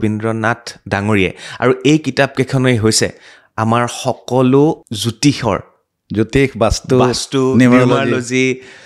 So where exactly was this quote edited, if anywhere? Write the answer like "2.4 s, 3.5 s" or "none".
4.9 s